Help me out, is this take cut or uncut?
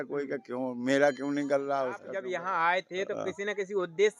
cut